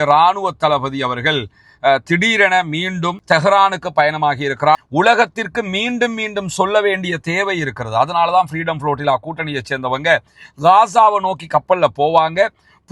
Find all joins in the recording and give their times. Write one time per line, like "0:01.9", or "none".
0:04.9